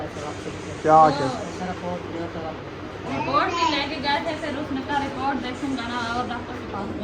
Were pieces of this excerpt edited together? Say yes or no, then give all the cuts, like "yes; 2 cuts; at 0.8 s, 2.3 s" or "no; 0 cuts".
no; 0 cuts